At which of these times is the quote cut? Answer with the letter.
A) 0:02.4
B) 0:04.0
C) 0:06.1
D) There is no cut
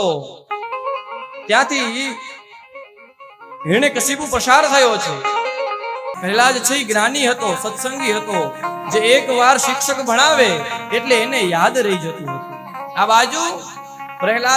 C